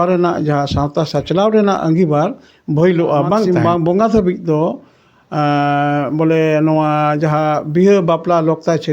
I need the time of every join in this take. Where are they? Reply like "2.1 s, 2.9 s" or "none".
3.5 s